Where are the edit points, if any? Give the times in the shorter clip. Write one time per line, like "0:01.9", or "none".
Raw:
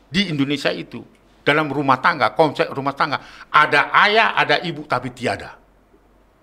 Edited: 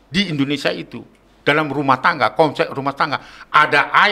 none